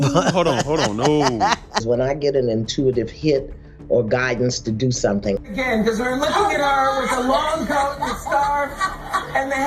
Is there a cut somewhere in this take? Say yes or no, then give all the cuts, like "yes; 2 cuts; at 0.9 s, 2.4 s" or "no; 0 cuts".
yes; 2 cuts; at 1.8 s, 5.4 s